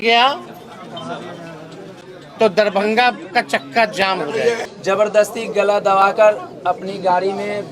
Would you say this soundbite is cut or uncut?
cut